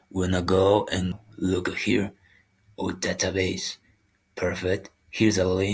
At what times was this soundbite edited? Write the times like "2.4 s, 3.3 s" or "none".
1.1 s